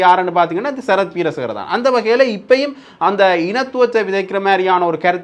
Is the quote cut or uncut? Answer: uncut